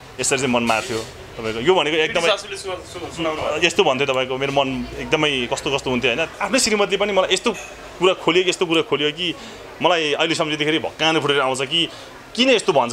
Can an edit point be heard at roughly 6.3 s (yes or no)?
yes